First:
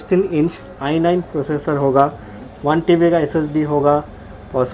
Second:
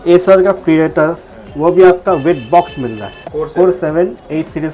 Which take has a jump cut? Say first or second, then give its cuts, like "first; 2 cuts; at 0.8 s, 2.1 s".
second; 1 cut; at 3.2 s